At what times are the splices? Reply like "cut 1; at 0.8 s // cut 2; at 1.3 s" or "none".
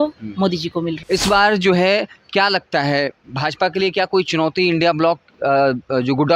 cut 1; at 1.0 s